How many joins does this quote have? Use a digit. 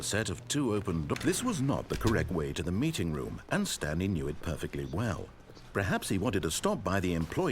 1